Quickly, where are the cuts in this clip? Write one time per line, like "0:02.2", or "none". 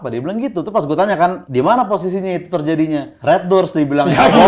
0:01.4
0:03.1